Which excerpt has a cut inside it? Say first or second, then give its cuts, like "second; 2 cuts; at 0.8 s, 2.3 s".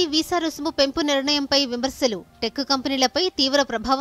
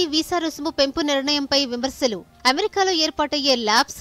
second; 1 cut; at 2.3 s